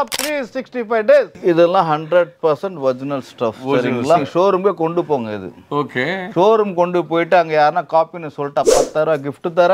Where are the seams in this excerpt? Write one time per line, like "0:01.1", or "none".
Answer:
0:01.4